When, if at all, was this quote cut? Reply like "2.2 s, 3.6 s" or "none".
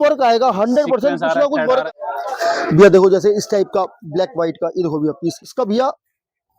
1.8 s, 5.4 s